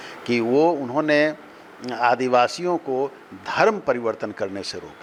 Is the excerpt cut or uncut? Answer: uncut